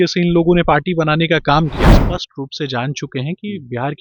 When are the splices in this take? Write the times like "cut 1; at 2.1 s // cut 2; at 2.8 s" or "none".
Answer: cut 1; at 1.9 s